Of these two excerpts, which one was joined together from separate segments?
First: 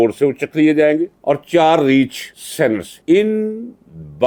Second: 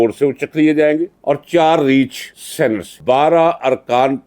second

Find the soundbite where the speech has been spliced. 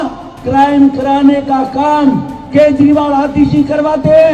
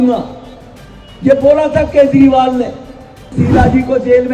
second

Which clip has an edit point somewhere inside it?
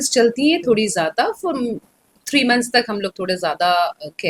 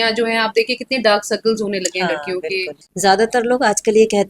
second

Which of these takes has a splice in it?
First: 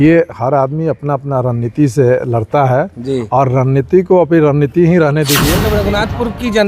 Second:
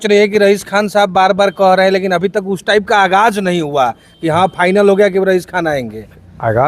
first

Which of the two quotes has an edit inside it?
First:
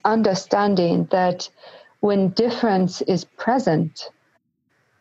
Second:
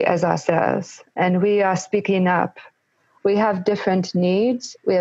second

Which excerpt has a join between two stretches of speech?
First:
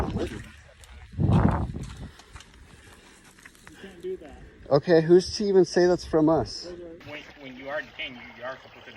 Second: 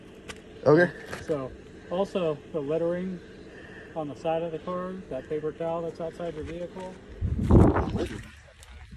first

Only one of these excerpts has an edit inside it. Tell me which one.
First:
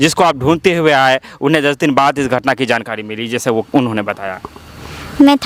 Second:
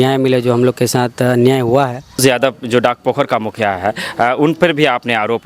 second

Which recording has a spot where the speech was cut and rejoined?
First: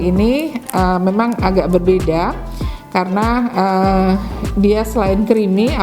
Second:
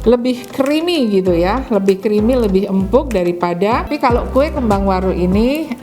second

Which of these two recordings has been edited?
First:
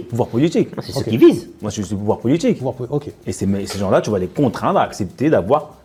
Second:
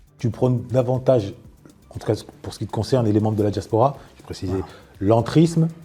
second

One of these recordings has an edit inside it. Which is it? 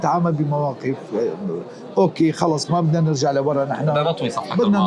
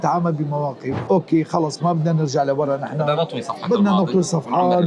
second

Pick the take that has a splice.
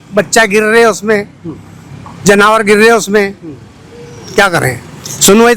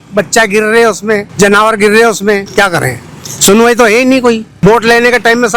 second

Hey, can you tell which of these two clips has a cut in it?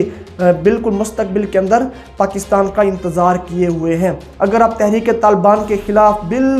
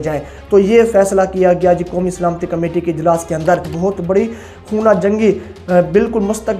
second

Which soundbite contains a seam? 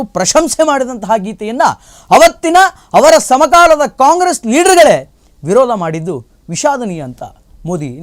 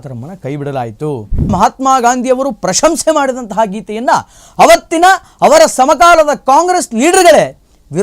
second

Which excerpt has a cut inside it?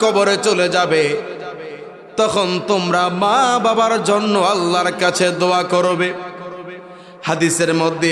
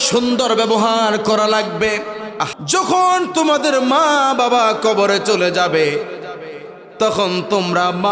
second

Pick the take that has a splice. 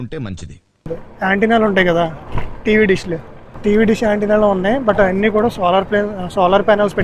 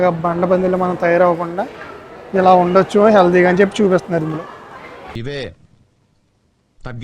first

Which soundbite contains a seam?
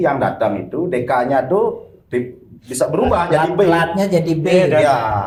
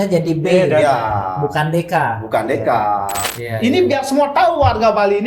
second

